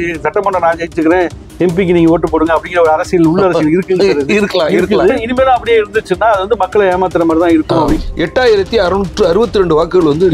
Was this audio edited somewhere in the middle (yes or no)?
yes